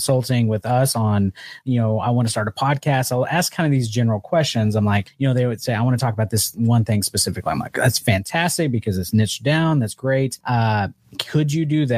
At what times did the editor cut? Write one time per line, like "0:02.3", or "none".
0:05.1
0:10.4